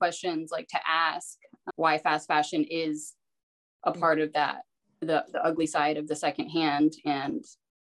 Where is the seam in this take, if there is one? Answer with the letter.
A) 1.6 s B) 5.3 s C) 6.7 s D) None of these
A